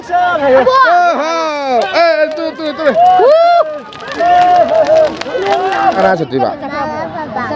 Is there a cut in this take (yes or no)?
yes